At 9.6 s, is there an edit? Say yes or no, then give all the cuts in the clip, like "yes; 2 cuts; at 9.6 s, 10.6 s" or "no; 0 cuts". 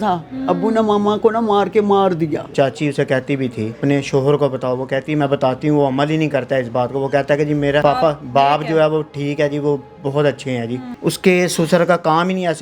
no; 4 cuts; at 2.5 s, 3.7 s, 7.8 s, 10.9 s